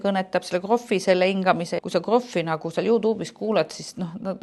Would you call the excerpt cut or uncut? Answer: cut